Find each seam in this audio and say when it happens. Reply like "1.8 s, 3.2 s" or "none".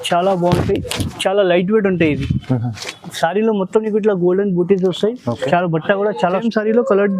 6.3 s